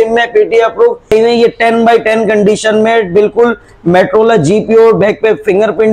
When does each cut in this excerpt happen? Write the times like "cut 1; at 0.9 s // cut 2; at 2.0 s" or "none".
cut 1; at 1.1 s